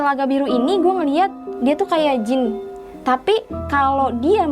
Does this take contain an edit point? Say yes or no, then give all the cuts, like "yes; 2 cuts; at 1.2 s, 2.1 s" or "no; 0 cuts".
yes; 1 cut; at 1.4 s